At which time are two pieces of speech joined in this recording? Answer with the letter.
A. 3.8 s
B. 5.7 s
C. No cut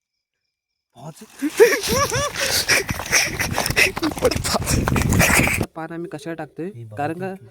B